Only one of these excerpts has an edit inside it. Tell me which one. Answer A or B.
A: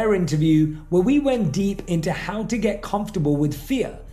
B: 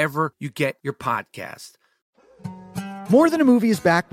B